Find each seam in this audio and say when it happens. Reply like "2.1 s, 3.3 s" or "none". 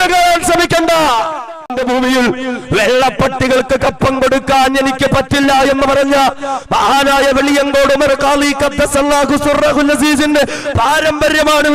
1.7 s